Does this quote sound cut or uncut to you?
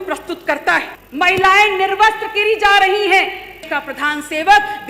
cut